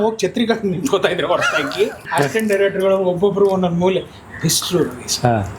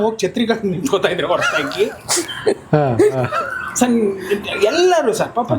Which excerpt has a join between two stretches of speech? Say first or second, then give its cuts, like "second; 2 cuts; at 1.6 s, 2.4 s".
first; 1 cut; at 2.0 s